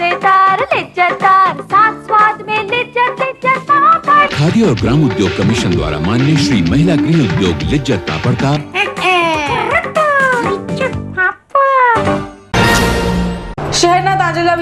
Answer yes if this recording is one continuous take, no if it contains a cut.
no